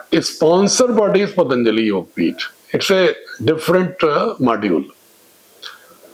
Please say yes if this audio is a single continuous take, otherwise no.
yes